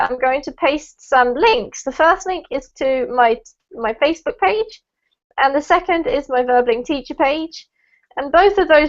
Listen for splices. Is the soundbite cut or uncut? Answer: cut